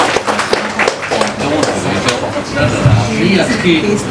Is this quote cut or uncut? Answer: uncut